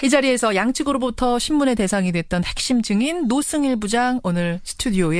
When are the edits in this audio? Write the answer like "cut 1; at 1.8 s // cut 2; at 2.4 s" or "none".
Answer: none